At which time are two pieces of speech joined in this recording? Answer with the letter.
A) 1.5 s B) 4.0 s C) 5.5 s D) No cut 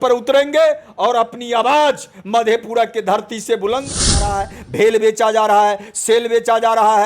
B